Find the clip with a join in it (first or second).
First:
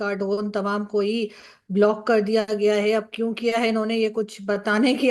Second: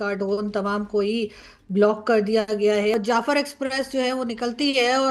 second